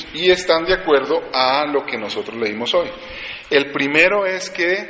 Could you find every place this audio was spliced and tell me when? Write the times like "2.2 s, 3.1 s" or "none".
2.1 s